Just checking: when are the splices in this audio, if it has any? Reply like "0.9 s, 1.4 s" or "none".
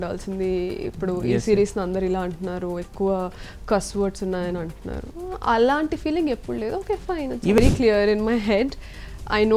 7.6 s